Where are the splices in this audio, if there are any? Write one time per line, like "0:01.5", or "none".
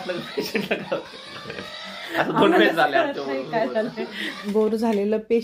0:04.3